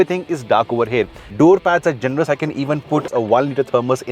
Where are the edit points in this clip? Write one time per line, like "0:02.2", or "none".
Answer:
0:01.2
0:03.1